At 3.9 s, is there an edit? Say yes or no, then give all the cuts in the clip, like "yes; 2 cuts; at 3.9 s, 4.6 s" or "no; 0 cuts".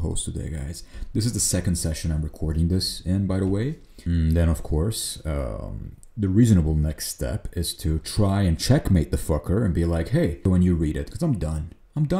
yes; 2 cuts; at 3.9 s, 10.5 s